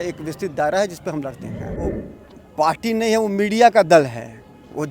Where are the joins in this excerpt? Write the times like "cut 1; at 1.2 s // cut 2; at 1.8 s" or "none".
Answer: cut 1; at 1.8 s